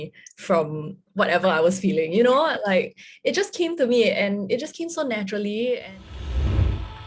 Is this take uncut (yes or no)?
no